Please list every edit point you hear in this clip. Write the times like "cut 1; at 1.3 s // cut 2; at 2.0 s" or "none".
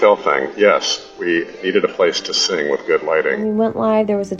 cut 1; at 3.4 s